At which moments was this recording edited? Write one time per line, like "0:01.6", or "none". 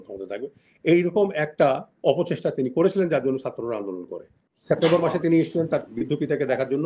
0:04.5